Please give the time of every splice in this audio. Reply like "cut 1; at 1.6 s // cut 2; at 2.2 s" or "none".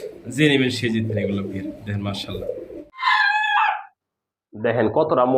cut 1; at 2.8 s